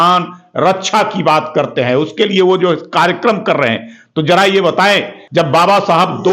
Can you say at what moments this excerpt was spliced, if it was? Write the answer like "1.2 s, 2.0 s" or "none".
5.2 s